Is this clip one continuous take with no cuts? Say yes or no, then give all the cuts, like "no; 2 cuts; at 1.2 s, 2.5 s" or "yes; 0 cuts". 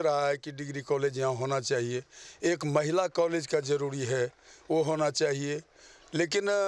yes; 0 cuts